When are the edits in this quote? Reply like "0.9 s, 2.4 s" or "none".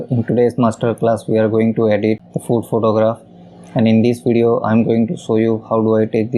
2.3 s